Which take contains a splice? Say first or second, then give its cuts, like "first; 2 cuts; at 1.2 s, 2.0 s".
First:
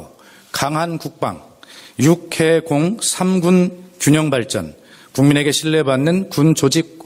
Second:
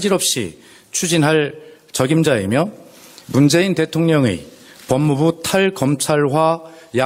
first; 1 cut; at 2.2 s